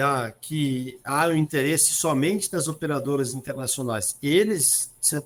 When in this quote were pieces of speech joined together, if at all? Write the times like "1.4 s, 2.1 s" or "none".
none